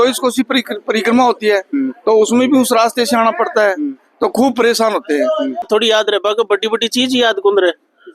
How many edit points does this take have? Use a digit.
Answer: 1